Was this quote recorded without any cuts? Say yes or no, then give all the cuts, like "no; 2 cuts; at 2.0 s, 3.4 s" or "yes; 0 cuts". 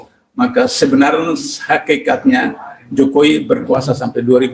yes; 0 cuts